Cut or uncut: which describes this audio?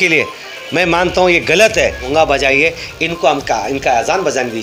cut